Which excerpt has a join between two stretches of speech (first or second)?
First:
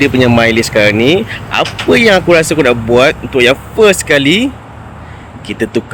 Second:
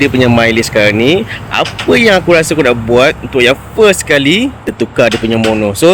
second